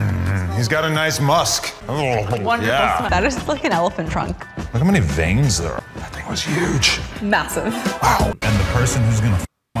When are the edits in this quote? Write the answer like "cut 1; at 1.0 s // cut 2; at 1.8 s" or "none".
cut 1; at 3.1 s // cut 2; at 5.9 s // cut 3; at 8.3 s